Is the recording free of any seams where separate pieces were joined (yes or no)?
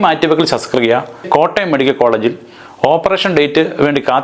no